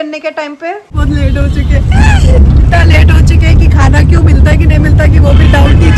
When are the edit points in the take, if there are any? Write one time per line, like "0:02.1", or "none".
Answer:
0:00.9